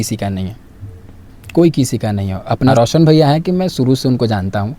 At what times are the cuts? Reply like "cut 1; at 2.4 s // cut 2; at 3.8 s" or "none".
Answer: cut 1; at 2.7 s